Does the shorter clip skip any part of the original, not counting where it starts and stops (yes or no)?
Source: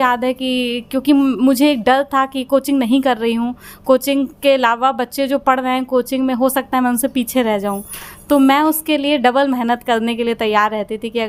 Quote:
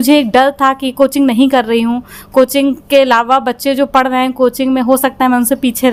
no